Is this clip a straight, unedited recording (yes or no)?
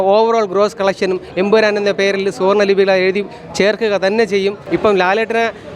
no